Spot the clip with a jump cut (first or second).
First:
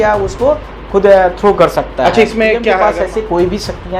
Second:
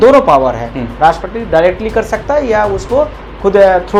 first